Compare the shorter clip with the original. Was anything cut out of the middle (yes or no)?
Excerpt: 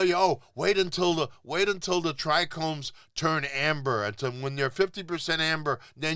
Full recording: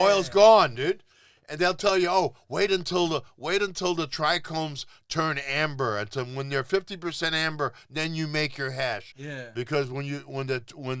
no